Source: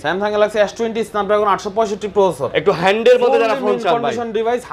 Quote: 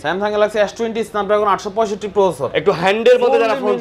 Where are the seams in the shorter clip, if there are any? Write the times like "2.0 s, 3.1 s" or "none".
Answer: none